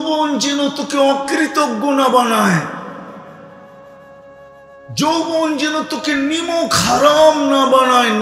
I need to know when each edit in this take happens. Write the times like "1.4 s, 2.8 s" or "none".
3.5 s, 4.9 s